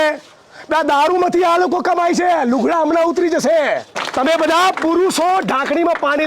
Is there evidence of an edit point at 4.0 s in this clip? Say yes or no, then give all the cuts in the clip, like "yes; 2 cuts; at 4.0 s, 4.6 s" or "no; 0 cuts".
yes; 1 cut; at 4.0 s